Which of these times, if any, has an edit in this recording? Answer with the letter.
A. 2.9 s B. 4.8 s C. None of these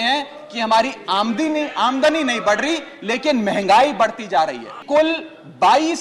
B